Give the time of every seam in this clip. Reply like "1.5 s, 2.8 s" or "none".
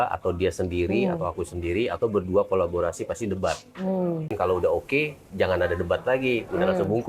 4.3 s